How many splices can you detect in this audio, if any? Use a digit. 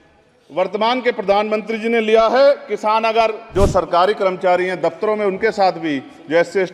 1